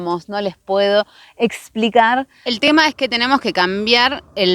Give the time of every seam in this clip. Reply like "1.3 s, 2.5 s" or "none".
2.5 s

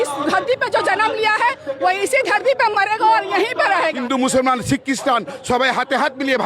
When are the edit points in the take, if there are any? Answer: 4.0 s

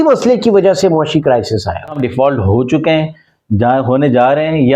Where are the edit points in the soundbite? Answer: 2.0 s

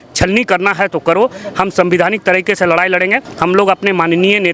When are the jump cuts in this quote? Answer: none

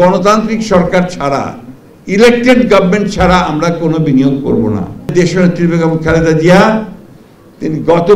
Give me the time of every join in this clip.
5.1 s

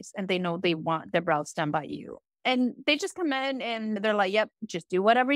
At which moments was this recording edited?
4.0 s

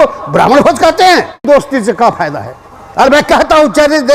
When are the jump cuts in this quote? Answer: 1.4 s

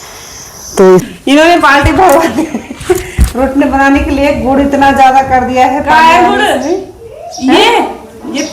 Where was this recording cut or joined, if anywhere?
1.1 s

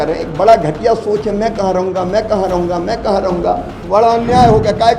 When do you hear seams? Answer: 3.7 s

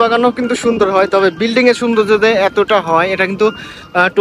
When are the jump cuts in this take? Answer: none

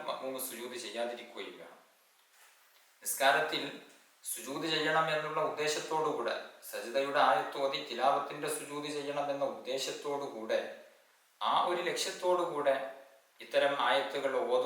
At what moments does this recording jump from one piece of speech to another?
2.3 s

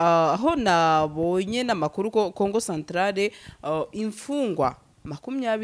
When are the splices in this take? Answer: none

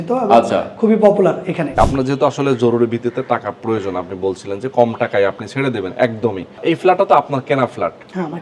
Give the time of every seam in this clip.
1.8 s, 6.6 s

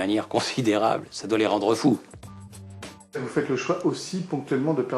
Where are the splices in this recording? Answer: none

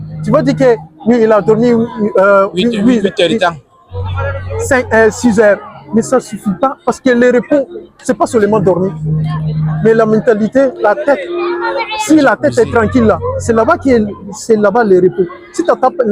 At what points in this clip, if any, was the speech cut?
none

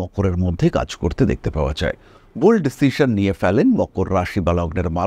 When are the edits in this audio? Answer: 2.2 s

